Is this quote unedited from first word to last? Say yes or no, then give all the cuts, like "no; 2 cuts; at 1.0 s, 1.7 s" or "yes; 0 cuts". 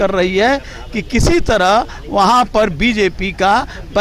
yes; 0 cuts